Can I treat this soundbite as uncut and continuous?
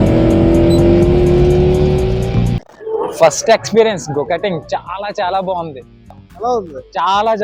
yes; 0 cuts

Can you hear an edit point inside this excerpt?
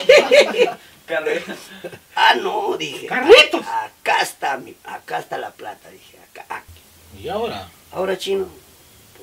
yes; 1 cut; at 6.7 s

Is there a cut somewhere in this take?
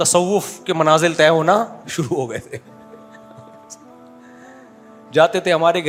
no; 0 cuts

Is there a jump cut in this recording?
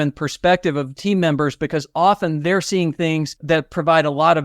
yes; 2 cuts; at 0.9 s, 3.3 s

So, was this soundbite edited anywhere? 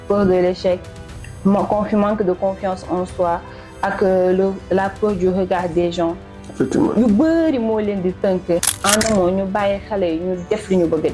yes; 1 cut; at 8.6 s

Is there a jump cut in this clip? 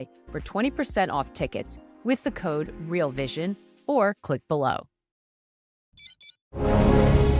yes; 1 cut; at 5.6 s

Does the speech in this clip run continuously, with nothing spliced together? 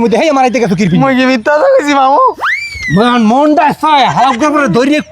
yes; 0 cuts

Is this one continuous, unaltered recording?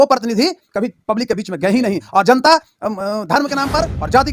yes; 0 cuts

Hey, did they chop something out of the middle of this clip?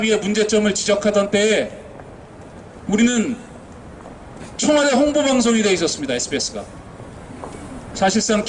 no; 0 cuts

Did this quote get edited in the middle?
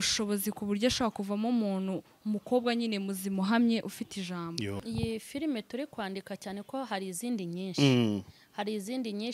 yes; 1 cut; at 4.8 s

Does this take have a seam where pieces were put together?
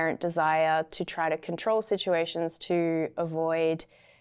no; 0 cuts

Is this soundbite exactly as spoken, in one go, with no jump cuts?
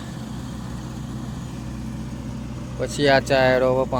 yes; 0 cuts

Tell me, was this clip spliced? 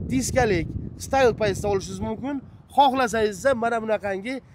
no; 0 cuts

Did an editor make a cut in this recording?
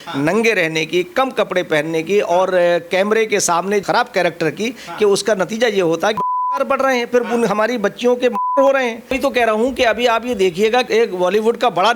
yes; 4 cuts; at 3.8 s, 6.2 s, 9.1 s, 10.9 s

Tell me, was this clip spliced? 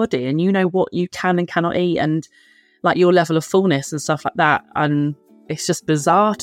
yes; 1 cut; at 5.5 s

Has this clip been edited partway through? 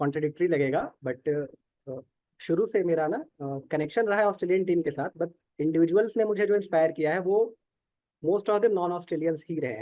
no; 0 cuts

